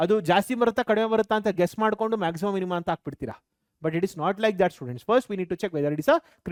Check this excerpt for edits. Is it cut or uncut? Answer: uncut